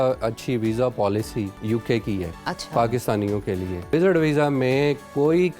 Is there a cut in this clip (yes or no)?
yes